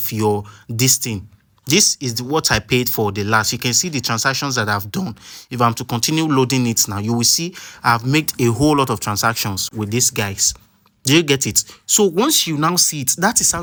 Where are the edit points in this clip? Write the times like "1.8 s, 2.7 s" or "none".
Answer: none